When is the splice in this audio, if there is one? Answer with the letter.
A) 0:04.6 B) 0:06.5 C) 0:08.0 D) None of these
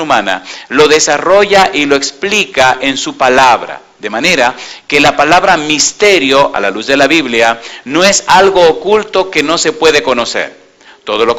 D